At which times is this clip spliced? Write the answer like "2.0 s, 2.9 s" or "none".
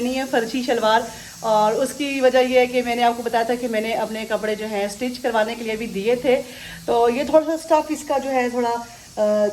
none